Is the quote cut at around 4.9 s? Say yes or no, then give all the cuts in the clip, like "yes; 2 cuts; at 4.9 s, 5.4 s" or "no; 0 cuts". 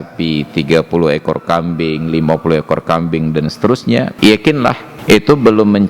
yes; 2 cuts; at 4.1 s, 4.9 s